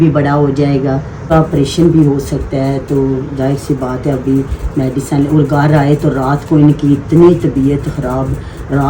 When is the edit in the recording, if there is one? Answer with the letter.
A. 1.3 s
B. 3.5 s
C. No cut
A